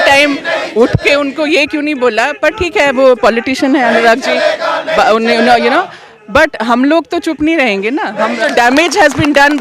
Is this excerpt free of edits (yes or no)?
no